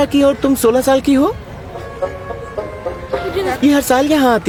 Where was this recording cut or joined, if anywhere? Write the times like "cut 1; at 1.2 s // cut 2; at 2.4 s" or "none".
none